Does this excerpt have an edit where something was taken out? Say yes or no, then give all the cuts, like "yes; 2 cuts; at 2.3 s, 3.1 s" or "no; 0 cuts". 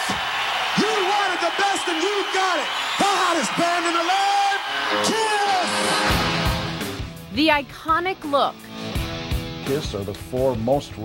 no; 0 cuts